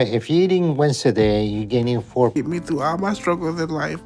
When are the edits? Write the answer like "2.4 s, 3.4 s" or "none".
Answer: 2.3 s